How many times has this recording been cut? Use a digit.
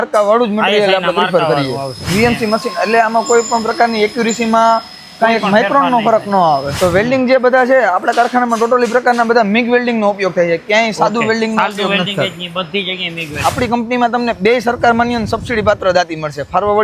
3